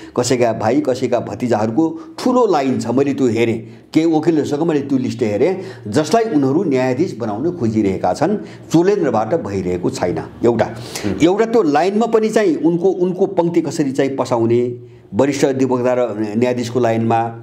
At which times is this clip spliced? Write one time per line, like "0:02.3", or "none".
none